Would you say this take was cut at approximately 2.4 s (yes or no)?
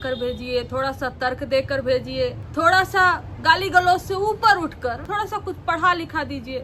yes